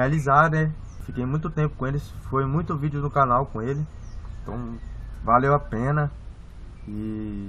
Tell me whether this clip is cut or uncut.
cut